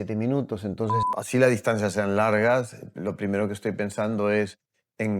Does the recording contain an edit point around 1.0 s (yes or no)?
yes